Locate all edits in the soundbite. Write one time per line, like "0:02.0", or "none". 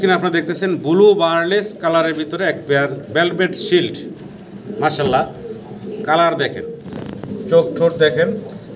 none